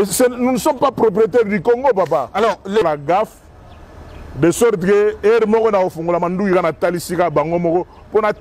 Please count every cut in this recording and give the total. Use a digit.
1